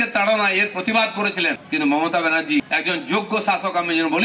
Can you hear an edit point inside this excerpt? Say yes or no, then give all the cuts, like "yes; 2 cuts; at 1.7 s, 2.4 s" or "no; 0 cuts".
yes; 2 cuts; at 1.6 s, 2.7 s